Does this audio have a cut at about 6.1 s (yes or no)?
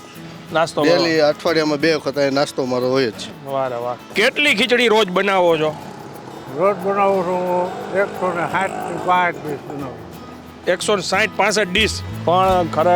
no